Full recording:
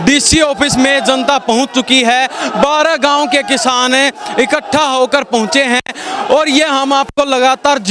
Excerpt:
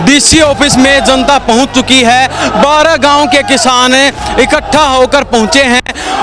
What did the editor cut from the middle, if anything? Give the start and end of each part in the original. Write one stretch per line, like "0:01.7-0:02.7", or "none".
none